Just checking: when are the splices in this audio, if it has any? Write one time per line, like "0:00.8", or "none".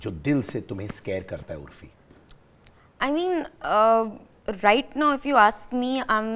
none